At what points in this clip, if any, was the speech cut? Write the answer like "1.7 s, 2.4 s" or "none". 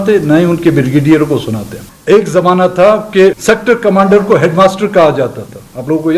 1.9 s, 3.4 s